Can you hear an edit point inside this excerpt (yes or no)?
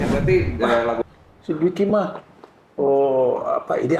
yes